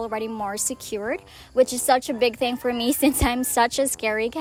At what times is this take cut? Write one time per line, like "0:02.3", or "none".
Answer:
none